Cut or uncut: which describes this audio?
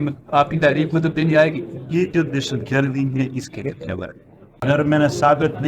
cut